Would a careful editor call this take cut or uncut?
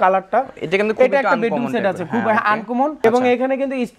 cut